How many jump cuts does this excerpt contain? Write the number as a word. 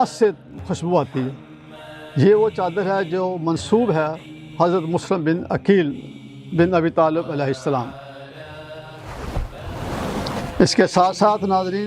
zero